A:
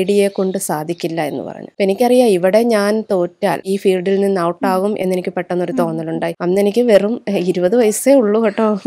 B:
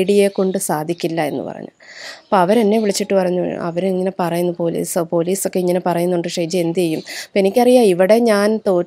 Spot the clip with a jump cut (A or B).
A